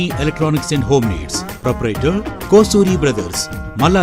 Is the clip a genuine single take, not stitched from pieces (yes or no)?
yes